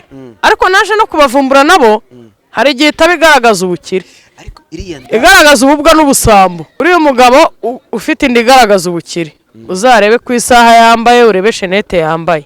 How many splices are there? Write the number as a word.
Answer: one